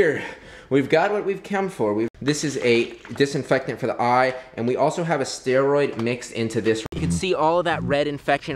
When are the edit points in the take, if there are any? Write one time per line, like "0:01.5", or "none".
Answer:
0:02.2
0:06.8